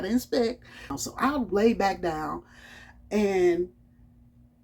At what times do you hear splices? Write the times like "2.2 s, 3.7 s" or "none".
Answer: 0.9 s